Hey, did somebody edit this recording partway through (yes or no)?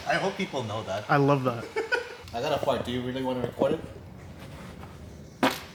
no